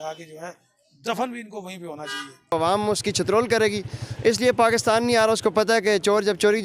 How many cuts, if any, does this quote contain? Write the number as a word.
one